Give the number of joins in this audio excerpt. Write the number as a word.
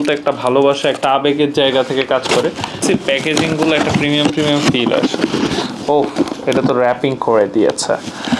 one